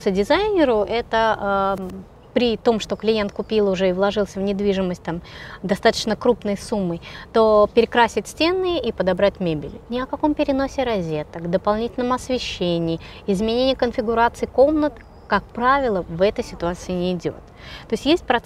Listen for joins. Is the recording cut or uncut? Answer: uncut